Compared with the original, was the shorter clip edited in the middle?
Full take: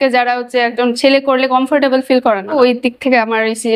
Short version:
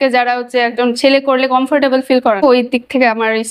yes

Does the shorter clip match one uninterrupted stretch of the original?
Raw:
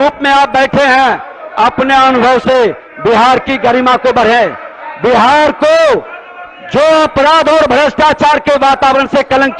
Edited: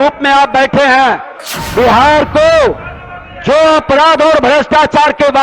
no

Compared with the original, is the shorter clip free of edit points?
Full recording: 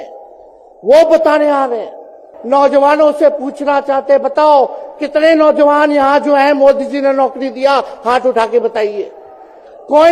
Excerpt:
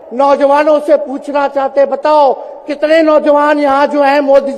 yes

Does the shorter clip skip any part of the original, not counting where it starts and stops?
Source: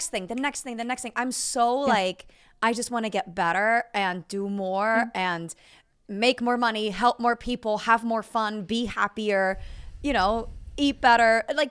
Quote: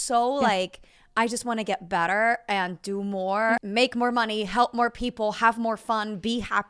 yes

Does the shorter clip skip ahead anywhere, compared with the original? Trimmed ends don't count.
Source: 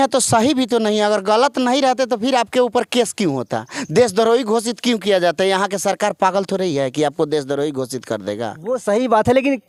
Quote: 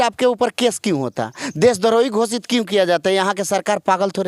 no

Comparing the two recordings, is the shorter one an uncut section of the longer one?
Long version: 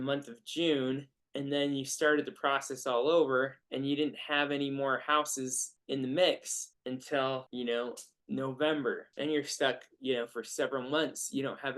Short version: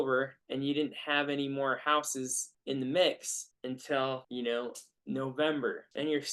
yes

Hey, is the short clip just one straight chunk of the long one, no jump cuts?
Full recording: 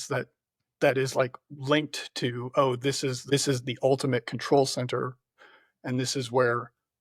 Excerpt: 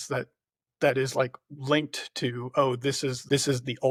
yes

